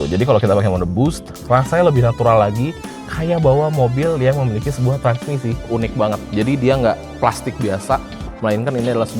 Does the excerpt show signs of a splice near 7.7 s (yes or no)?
no